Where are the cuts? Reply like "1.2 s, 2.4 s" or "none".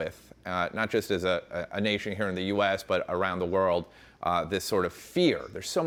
none